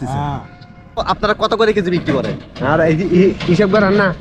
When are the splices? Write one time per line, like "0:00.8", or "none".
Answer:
0:01.0